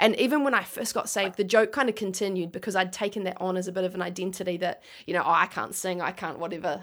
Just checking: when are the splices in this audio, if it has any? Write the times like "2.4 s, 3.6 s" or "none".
1.3 s